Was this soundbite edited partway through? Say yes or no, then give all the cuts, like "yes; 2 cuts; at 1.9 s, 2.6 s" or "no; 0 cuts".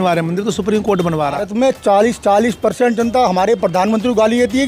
yes; 1 cut; at 1.5 s